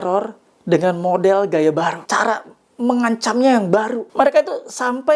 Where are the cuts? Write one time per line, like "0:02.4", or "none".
0:02.0
0:04.0